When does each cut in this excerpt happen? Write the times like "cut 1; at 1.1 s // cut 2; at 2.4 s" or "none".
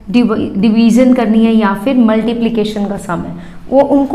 none